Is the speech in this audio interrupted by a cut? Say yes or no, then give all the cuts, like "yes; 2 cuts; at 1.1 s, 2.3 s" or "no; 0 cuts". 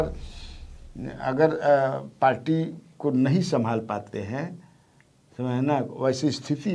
no; 0 cuts